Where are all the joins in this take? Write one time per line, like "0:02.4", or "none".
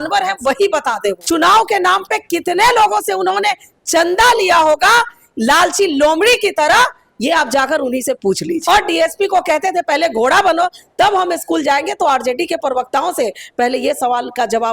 0:01.2
0:08.6

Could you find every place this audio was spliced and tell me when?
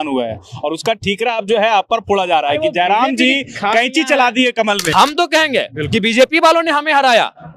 0:04.9

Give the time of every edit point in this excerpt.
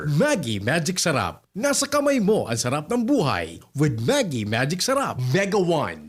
none

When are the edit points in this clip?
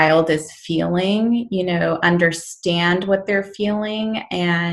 none

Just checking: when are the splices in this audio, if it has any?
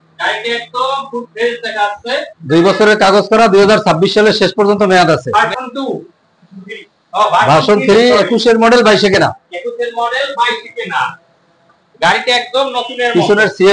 0:05.3

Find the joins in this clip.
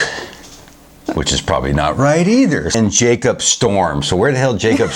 0:02.8

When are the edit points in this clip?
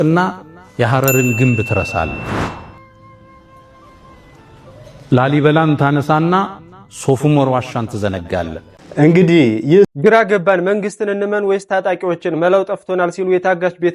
0:09.9

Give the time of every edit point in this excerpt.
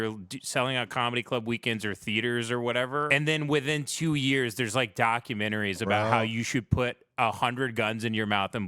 0:03.1

